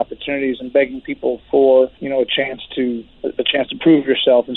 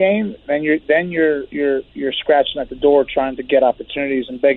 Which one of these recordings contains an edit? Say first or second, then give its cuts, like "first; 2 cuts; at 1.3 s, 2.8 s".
first; 2 cuts; at 2.0 s, 3.1 s